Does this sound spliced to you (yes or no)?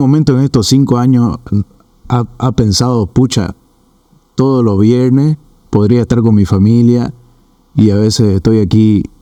no